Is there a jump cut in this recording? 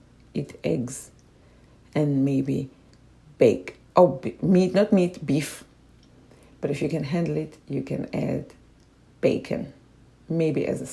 no; 0 cuts

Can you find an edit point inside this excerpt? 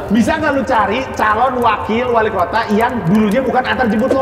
no; 0 cuts

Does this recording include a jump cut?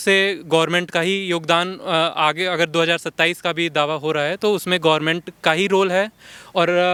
no; 0 cuts

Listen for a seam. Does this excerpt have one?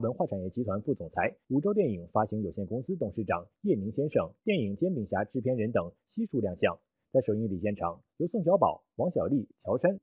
no; 0 cuts

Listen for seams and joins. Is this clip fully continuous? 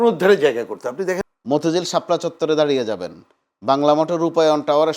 no; 1 cut; at 1.3 s

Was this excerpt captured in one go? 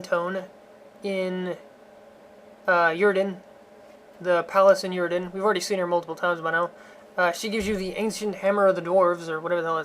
no; 1 cut; at 6.4 s

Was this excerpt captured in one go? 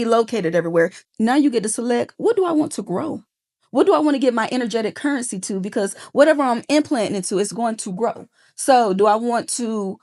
no; 1 cut; at 1.0 s

